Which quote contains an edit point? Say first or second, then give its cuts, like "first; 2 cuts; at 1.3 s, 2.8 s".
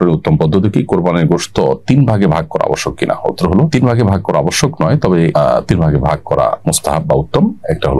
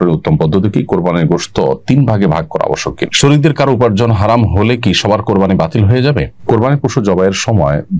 second; 2 cuts; at 3.0 s, 6.3 s